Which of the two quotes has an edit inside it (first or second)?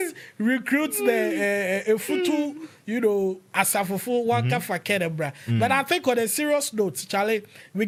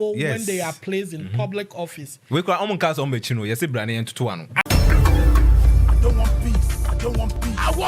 second